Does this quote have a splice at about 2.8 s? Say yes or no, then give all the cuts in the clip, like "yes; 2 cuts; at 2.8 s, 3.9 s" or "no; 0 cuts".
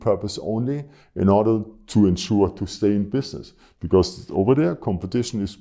no; 0 cuts